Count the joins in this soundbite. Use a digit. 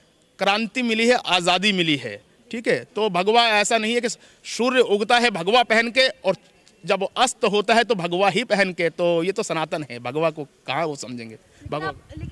0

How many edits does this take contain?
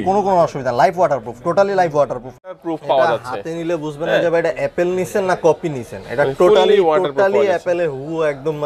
1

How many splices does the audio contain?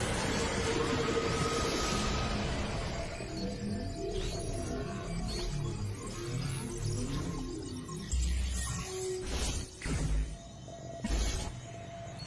0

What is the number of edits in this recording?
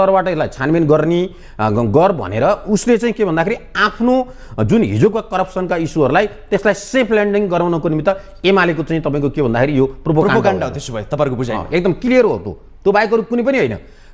0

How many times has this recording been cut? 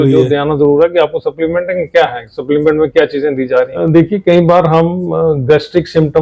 1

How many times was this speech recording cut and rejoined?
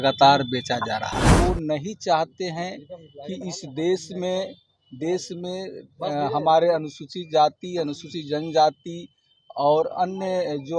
1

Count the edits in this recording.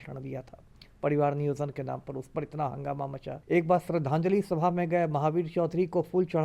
1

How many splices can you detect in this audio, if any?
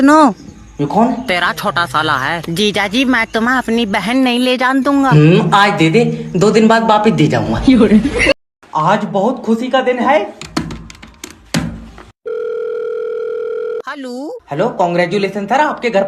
1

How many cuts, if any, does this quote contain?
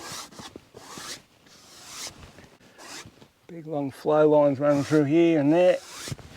1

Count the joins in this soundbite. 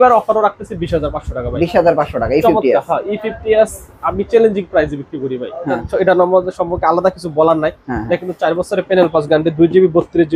1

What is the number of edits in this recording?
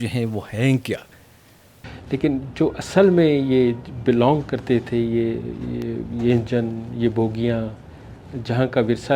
1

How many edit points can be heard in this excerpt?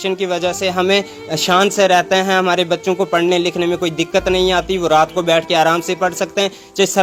0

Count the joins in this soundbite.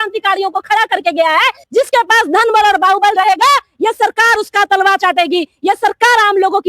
1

